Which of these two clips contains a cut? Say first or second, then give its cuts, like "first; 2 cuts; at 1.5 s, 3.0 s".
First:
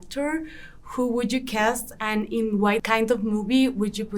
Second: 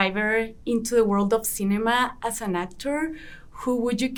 first; 1 cut; at 2.8 s